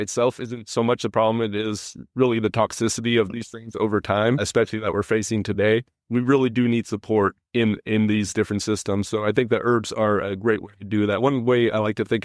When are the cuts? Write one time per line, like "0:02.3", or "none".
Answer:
0:03.3
0:04.5